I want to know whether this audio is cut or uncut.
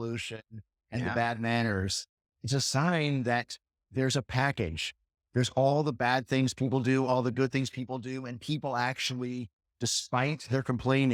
uncut